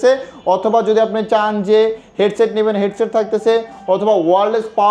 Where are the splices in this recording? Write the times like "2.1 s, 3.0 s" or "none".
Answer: none